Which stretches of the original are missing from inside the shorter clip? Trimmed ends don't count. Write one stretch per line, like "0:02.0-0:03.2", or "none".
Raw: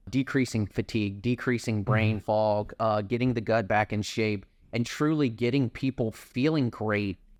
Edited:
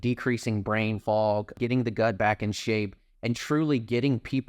0:02.7-0:03.0